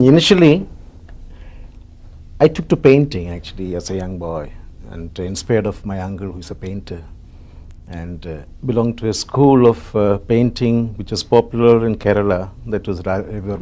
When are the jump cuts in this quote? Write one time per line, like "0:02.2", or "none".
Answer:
none